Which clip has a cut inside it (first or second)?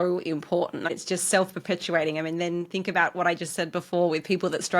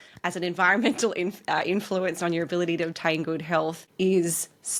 first